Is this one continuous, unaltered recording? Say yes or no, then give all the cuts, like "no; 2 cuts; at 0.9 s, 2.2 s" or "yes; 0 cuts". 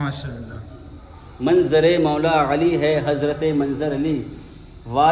yes; 0 cuts